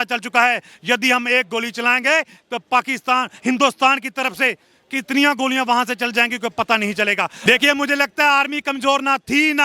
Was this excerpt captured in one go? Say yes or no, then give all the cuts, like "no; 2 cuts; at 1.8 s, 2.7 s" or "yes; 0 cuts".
no; 1 cut; at 7.3 s